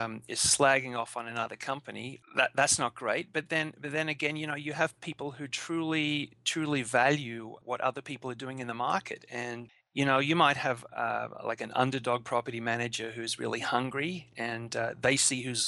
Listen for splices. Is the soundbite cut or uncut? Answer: cut